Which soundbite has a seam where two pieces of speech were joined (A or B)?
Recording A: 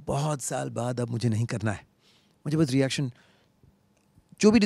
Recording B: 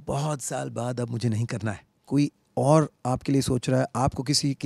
B